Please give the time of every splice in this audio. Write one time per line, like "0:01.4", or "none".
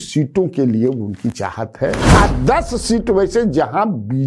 0:02.0